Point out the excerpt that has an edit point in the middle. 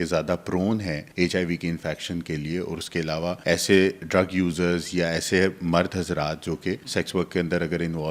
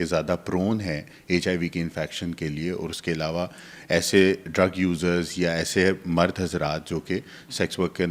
first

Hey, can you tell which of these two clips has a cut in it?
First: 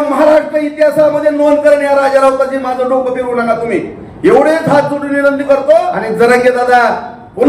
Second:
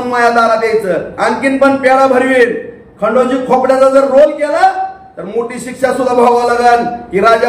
first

